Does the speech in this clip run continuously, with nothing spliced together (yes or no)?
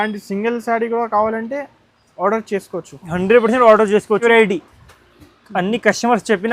no